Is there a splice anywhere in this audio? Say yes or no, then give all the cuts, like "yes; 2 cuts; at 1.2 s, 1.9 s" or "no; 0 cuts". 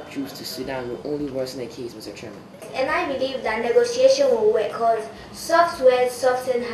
no; 0 cuts